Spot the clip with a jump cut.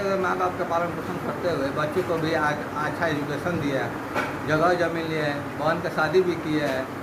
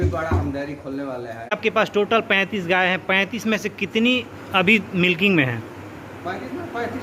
second; 1 cut; at 1.5 s

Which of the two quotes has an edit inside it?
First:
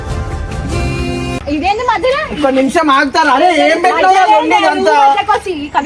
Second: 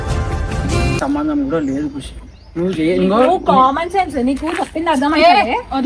second; 1 cut; at 1.0 s

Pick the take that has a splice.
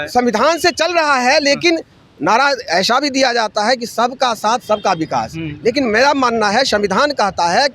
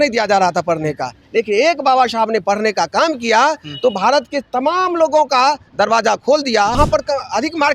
second; 1 cut; at 6.8 s

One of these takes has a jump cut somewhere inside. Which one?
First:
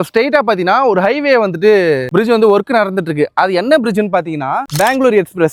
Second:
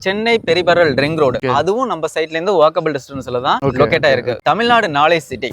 second; 2 cuts; at 1.4 s, 4.4 s

